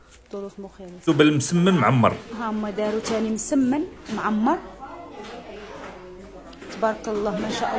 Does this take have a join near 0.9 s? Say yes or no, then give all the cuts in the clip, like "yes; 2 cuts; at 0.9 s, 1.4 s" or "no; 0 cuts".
yes; 1 cut; at 0.9 s